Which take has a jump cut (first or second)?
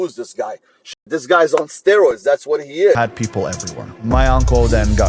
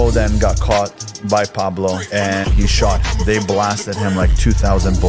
first